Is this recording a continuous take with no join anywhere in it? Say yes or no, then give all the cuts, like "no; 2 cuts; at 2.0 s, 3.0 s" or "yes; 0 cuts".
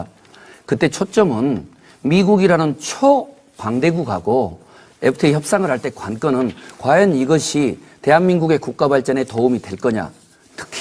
no; 1 cut; at 5.5 s